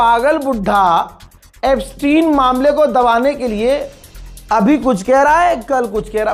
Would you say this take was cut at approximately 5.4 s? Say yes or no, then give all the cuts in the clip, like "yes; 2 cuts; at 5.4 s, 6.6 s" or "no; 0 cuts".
no; 0 cuts